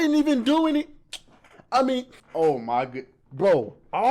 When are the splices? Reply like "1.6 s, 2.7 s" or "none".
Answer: 2.2 s